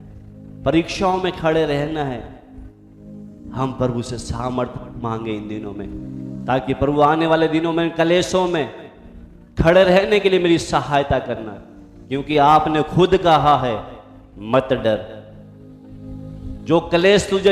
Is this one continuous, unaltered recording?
yes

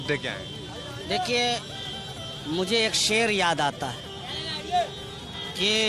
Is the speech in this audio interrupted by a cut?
no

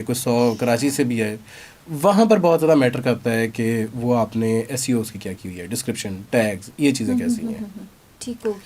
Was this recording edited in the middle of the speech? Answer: no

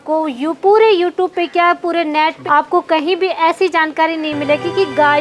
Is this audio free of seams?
no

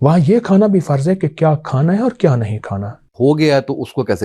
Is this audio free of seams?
no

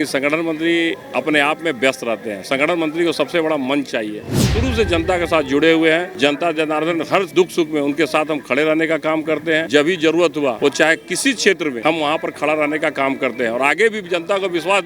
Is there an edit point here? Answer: yes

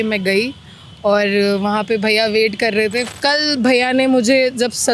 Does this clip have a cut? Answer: yes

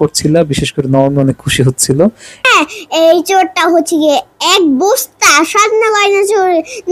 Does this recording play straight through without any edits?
no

